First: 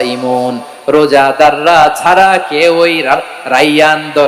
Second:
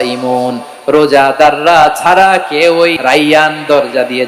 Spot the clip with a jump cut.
second; 1 cut; at 3.0 s

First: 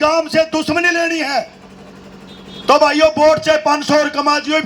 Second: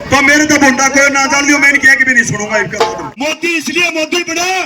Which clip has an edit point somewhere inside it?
second; 1 cut; at 3.1 s

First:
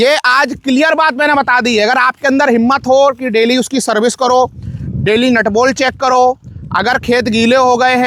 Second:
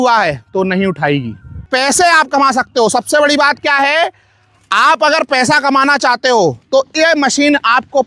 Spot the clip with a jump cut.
second; 1 cut; at 1.6 s

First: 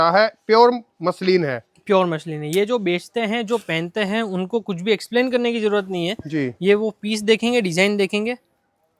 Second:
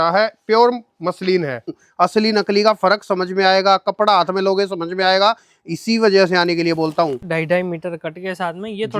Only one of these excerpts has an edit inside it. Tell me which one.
second; 2 cuts; at 1.8 s, 7.2 s

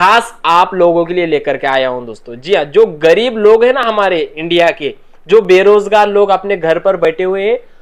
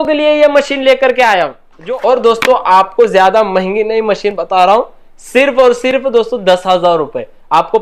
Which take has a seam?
second; 1 cut; at 1.7 s

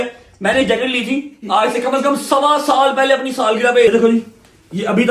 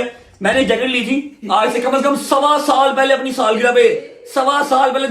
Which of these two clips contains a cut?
first; 1 cut; at 3.9 s

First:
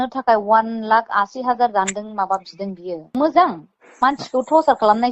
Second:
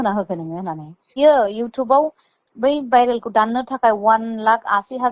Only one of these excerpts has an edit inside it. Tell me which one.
second; 1 cut; at 1.1 s

